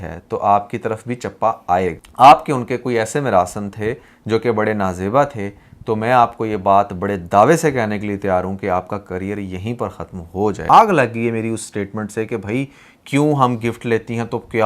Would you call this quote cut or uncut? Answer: cut